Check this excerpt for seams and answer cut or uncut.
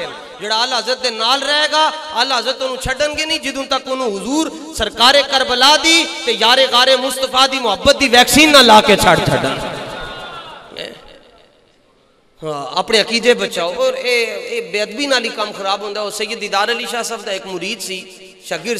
uncut